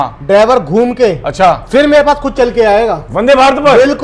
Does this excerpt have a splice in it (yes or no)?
no